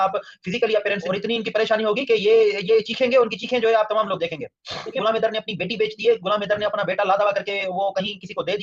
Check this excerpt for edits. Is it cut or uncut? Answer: cut